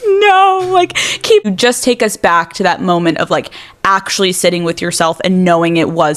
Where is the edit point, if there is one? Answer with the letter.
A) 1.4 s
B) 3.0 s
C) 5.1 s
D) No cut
A